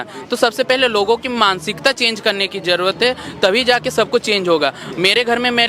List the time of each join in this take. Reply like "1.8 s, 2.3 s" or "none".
none